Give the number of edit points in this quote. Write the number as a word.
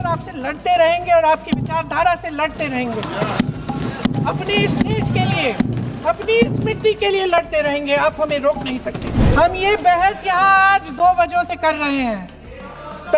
one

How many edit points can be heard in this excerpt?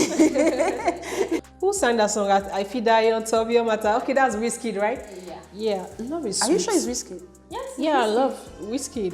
one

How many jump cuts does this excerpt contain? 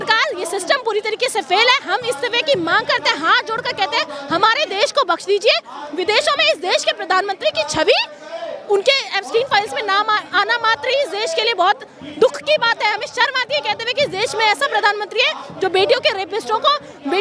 zero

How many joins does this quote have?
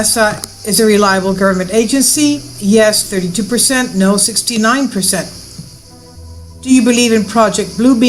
one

